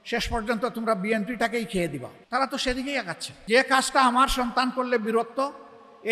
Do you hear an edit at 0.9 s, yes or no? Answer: no